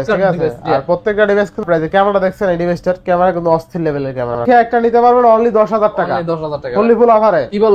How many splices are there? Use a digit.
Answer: 2